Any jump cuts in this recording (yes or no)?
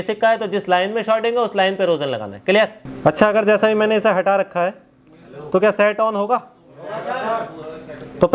yes